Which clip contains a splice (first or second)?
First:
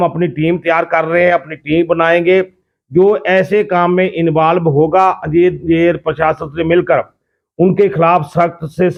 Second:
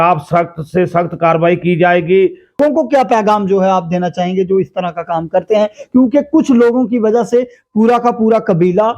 second